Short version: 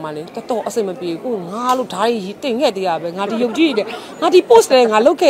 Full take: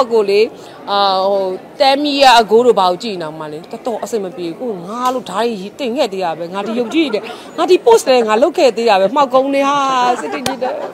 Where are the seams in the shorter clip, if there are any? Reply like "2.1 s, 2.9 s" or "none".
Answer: none